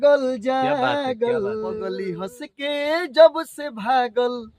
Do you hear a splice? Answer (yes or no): yes